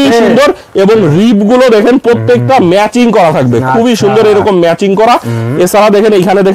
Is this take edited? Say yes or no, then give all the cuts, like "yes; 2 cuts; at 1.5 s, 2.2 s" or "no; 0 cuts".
no; 0 cuts